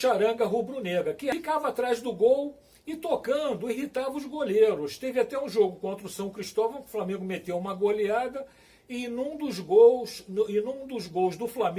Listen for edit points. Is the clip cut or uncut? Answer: cut